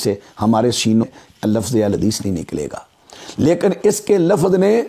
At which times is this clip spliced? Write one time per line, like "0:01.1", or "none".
0:01.0